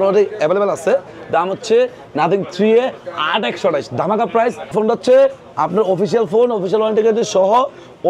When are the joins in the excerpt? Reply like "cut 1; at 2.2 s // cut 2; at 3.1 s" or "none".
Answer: cut 1; at 4.7 s